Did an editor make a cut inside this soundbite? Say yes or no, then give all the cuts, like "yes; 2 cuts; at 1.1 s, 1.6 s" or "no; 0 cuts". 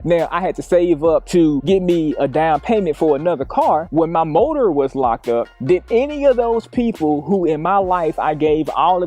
yes; 1 cut; at 3.8 s